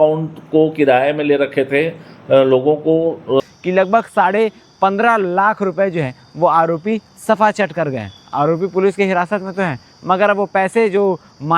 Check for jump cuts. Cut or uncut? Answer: cut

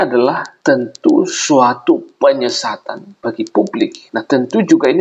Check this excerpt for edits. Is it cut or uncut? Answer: cut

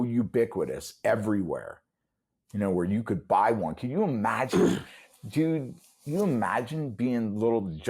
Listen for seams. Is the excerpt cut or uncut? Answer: uncut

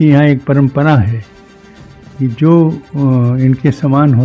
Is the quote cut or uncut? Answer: uncut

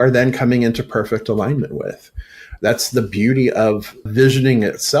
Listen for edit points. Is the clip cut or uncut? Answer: cut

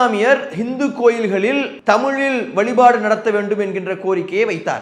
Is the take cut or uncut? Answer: cut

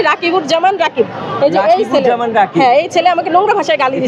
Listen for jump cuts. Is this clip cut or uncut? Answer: uncut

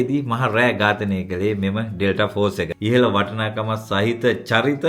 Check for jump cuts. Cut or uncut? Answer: cut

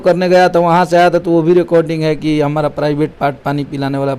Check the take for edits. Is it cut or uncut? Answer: uncut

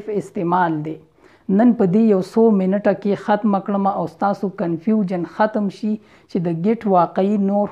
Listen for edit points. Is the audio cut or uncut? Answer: uncut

